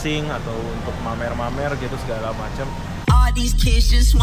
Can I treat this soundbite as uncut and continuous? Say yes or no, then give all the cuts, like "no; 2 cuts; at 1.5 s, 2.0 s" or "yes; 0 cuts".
no; 1 cut; at 3.0 s